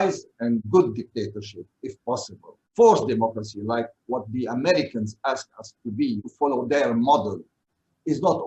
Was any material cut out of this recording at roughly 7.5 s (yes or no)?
no